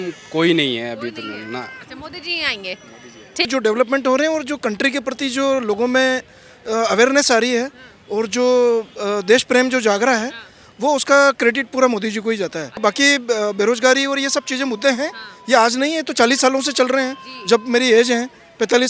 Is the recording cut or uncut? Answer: cut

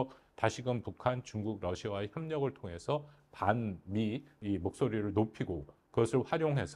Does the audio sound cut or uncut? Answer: uncut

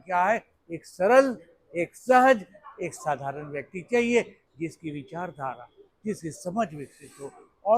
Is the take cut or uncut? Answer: uncut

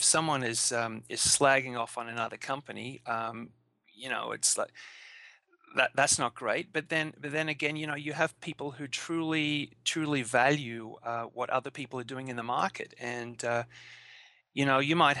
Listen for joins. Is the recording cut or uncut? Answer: uncut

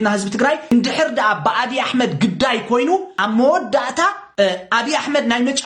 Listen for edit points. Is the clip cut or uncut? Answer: cut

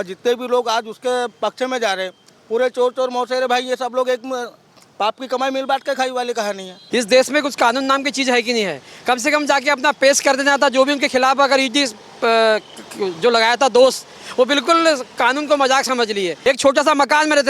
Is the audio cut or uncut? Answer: cut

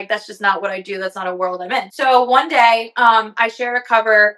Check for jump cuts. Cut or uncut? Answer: cut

